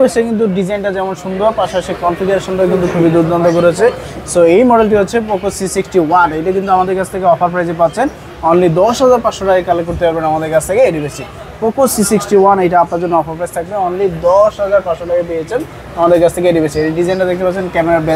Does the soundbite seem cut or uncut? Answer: uncut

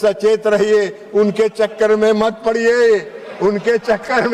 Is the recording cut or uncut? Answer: uncut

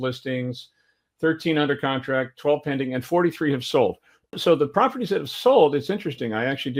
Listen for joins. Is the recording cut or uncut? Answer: uncut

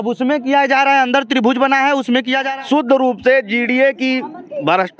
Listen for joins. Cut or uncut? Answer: cut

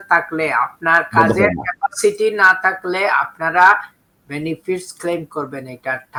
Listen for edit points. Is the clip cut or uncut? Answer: uncut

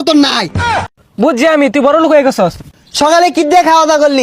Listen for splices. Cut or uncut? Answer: cut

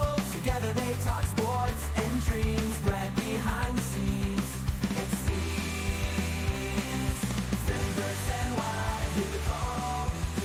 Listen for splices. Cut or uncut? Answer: uncut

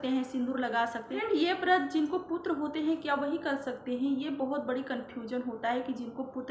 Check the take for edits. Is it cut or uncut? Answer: cut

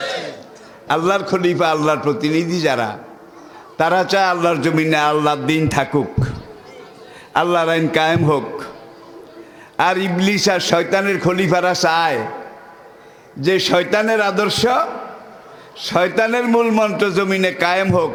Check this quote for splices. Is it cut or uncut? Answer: uncut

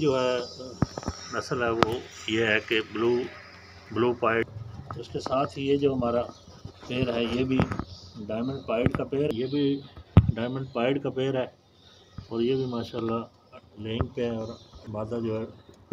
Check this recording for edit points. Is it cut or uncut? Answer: cut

